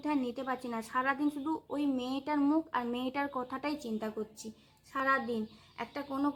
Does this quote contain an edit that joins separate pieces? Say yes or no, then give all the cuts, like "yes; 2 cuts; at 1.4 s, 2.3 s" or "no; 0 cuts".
no; 0 cuts